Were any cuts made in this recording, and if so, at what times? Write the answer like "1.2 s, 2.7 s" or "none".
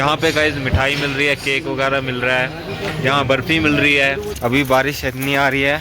4.3 s